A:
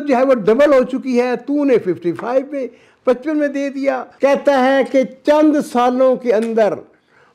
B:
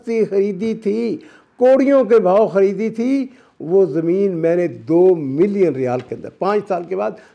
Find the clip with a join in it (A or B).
A